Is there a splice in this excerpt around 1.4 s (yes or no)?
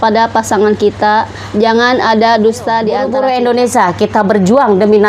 no